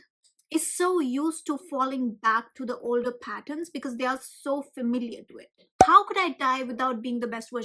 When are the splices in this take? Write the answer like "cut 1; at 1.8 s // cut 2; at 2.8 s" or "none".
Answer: cut 1; at 5.8 s